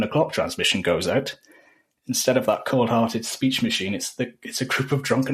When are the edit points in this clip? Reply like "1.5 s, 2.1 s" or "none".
none